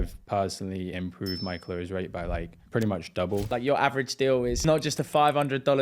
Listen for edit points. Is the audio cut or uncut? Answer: cut